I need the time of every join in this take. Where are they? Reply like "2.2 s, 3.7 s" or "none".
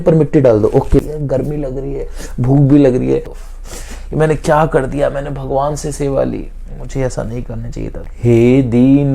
1.0 s, 3.4 s, 8.1 s